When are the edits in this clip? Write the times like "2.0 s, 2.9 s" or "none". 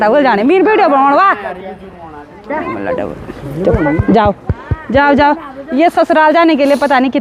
none